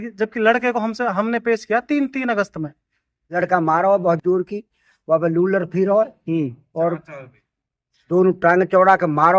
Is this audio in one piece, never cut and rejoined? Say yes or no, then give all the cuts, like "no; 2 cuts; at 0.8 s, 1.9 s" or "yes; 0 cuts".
no; 1 cut; at 3.2 s